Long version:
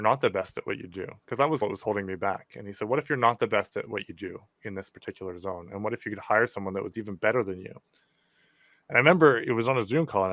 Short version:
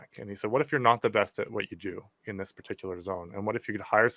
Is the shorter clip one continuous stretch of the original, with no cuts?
yes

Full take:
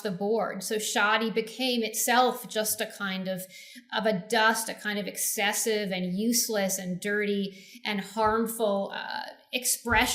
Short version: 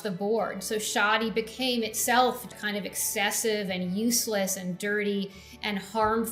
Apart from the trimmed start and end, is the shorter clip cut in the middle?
yes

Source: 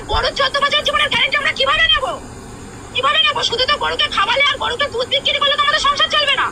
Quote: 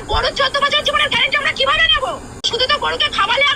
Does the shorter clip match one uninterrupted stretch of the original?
no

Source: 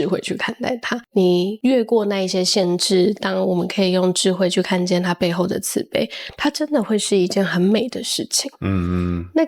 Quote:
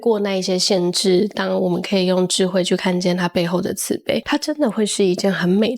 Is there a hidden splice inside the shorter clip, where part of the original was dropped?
yes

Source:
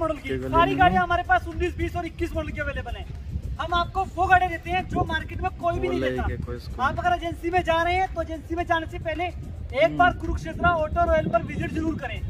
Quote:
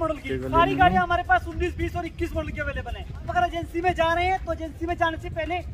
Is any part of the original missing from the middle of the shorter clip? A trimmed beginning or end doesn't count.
yes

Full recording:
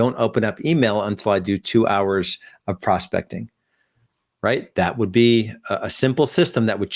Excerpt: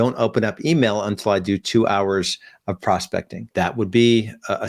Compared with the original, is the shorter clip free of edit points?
no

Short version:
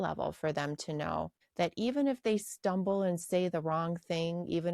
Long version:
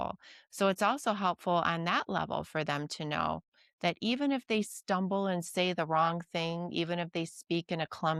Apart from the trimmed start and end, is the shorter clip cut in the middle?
yes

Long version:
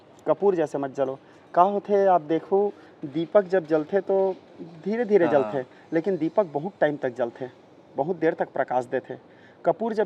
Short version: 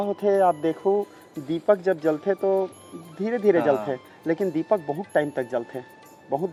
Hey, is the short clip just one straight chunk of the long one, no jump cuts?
yes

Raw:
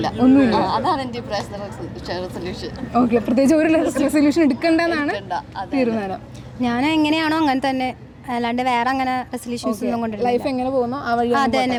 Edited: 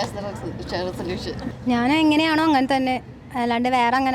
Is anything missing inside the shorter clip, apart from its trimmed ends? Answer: yes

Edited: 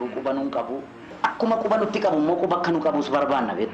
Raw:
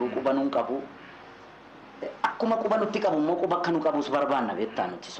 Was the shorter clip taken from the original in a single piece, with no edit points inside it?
no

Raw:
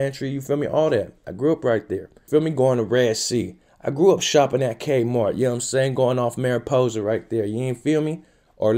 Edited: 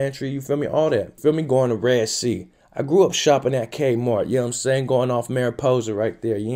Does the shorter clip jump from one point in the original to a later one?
yes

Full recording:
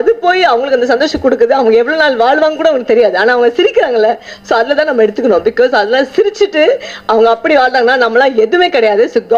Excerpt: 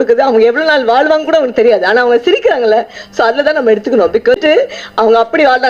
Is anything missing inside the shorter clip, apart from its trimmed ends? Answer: yes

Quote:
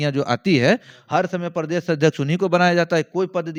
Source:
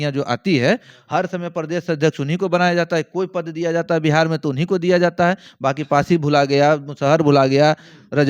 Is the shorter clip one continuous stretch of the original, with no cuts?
yes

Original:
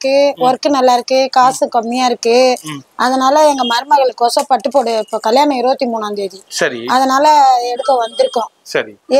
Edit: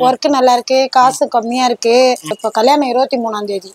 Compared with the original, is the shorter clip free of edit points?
no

